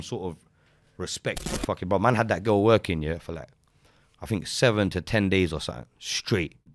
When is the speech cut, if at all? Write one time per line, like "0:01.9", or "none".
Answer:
0:01.4